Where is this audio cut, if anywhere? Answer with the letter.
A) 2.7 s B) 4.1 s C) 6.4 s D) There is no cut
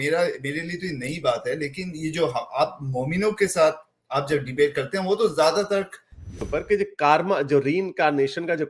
C